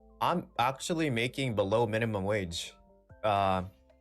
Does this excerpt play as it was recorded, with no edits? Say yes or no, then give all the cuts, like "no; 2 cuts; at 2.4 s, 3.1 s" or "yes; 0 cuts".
yes; 0 cuts